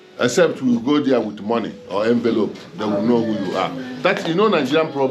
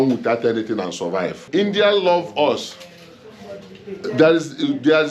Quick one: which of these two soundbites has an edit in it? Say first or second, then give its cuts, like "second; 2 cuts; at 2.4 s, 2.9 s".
second; 1 cut; at 1.4 s